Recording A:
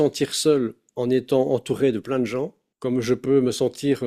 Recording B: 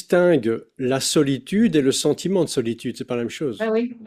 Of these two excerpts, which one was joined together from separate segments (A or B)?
A